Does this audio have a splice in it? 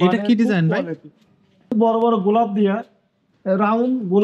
yes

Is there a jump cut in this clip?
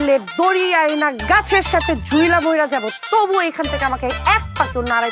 no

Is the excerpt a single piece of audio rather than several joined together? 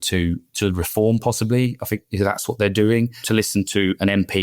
no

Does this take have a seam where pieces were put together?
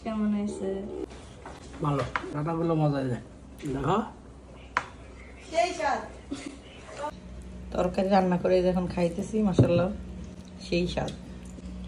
no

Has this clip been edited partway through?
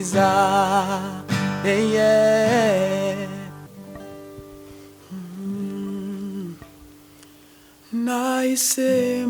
yes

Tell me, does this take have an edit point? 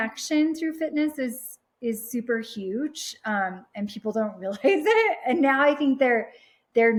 no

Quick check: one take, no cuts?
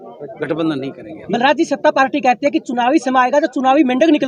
no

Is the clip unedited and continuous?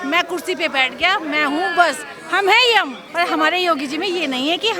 no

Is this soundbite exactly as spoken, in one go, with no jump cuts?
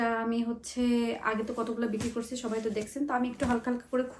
yes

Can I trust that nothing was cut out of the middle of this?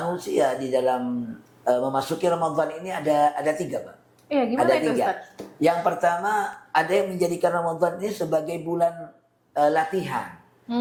yes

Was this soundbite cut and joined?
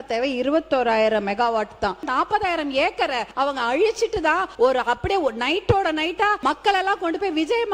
yes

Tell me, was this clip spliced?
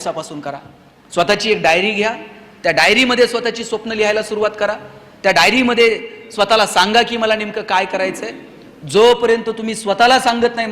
no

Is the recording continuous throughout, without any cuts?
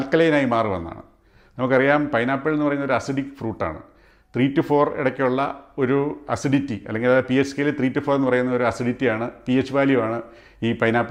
yes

